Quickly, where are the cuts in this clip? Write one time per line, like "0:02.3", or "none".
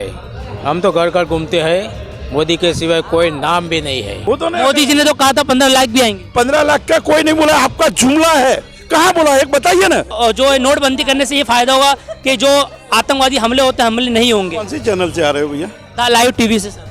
0:04.2
0:10.1